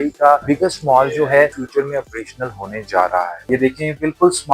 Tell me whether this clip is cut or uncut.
cut